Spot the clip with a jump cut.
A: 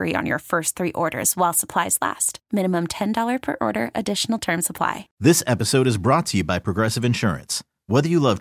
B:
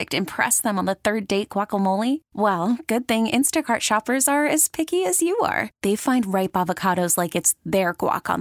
A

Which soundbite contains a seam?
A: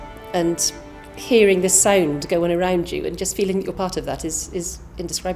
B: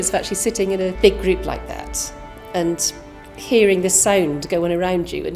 B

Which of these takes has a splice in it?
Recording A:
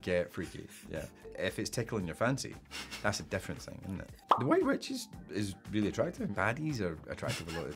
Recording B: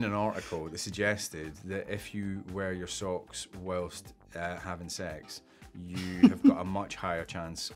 A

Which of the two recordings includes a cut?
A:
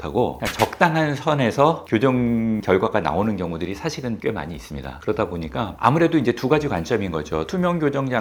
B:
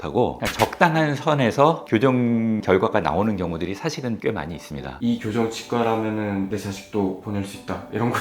B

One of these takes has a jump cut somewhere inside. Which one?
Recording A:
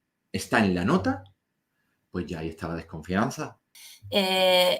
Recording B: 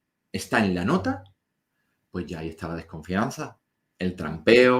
A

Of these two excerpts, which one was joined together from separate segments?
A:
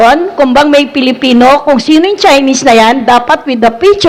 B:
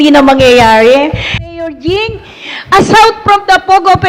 B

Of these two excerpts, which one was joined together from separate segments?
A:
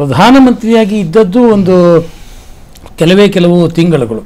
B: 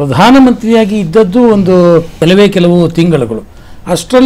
B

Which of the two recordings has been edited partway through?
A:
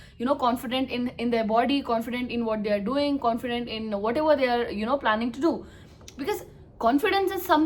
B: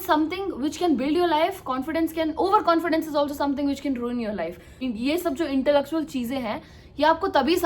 B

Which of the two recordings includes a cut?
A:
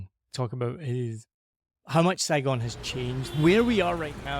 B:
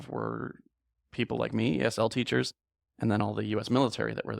A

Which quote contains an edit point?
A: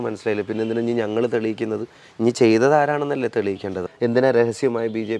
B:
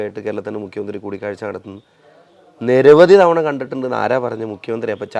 A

